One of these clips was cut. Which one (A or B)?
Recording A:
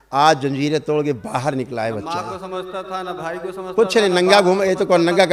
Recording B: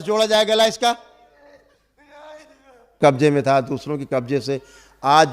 B